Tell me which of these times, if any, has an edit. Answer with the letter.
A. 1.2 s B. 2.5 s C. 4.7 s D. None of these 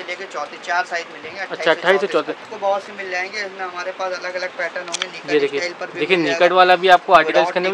B